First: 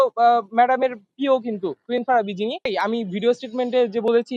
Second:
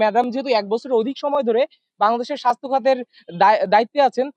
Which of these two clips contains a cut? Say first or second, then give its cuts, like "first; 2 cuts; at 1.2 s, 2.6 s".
first; 1 cut; at 2.7 s